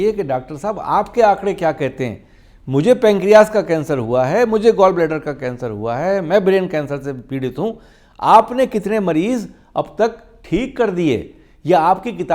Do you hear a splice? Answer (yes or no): no